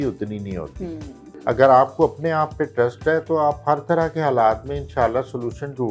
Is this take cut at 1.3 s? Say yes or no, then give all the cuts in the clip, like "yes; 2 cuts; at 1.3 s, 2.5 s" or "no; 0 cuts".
yes; 1 cut; at 1.3 s